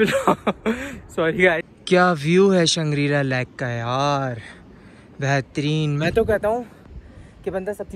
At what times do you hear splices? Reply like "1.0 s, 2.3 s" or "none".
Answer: 1.7 s

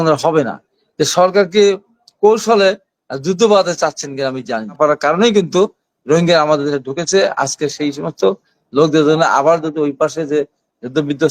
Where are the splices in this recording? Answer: 4.7 s

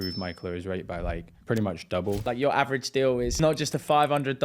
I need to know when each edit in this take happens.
1.3 s, 2.2 s, 3.4 s

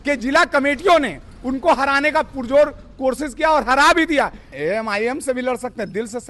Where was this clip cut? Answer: 4.5 s

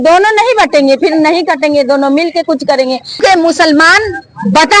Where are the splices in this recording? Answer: 3.2 s

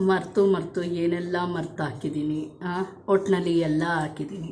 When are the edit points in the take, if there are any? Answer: none

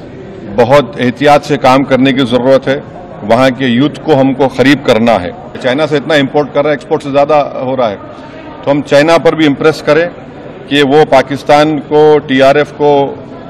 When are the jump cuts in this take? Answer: 5.5 s

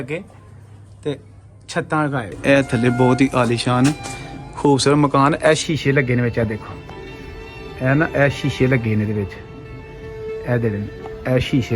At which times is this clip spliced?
2.4 s

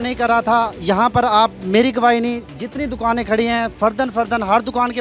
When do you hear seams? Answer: none

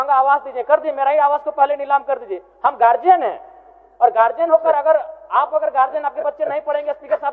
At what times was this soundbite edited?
none

